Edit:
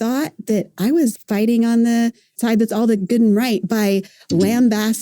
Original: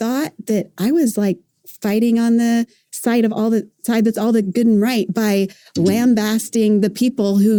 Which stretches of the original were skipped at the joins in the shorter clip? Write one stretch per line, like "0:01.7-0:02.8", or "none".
0:01.1-0:01.7
0:02.8-0:03.7